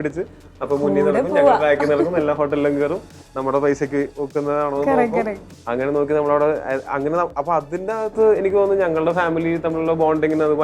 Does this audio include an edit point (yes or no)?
no